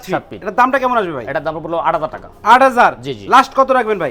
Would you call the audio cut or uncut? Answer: uncut